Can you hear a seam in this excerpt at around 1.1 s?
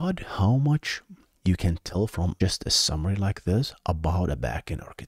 no; 1 cut; at 2.4 s

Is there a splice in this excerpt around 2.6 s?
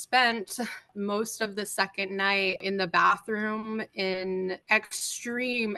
yes; 3 cuts; at 0.9 s, 2.6 s, 4.6 s

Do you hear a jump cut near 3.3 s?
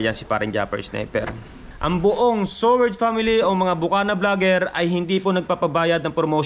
no; 1 cut; at 1.7 s

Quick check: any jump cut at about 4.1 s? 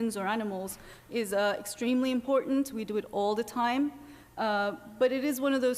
yes; 1 cut; at 4.1 s

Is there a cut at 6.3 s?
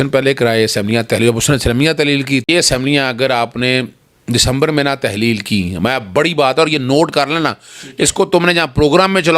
no; 1 cut; at 2.4 s

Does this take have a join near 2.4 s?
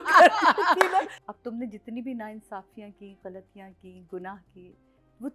no; 1 cut; at 1.2 s

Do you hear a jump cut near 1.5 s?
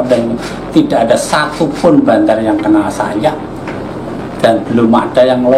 no; 0 cuts

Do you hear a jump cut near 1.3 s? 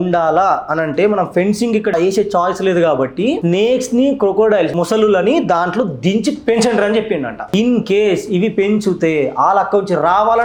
no; 0 cuts

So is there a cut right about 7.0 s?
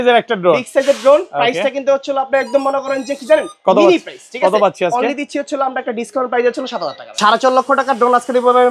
yes; 1 cut; at 7.0 s

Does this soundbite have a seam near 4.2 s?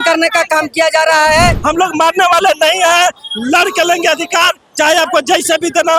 no; 1 cut; at 1.6 s

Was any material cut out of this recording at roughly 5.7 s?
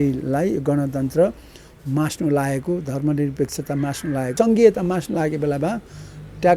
no; 1 cut; at 4.3 s

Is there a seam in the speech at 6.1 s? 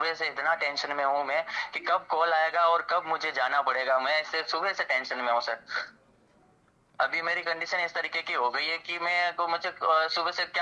no; 0 cuts

